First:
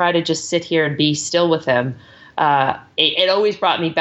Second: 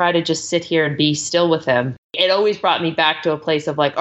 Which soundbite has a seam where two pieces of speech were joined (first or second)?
second